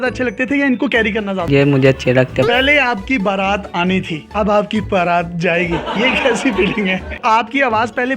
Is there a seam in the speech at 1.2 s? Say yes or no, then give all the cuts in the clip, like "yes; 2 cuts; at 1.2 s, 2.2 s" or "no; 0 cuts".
no; 2 cuts; at 2.5 s, 7.1 s